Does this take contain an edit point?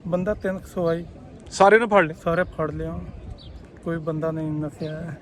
no; 0 cuts

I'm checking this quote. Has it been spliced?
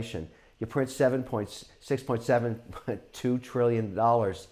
no; 0 cuts

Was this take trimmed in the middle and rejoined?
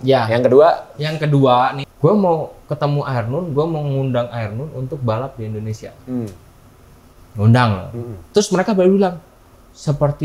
yes; 1 cut; at 1.8 s

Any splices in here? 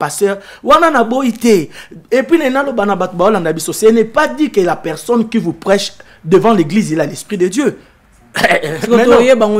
no; 0 cuts

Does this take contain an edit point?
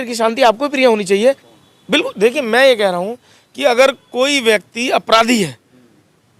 yes; 1 cut; at 1.5 s

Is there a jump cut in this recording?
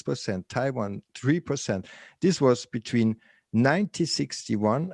no; 0 cuts

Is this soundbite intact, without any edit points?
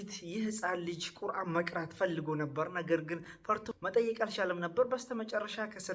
no; 1 cut; at 3.7 s

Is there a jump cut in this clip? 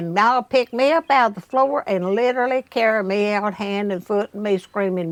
no; 0 cuts

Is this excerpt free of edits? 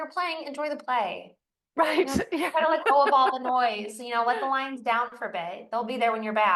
yes; 0 cuts

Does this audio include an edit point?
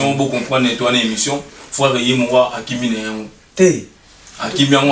no; 0 cuts

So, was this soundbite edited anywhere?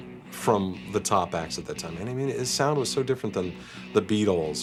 no; 0 cuts

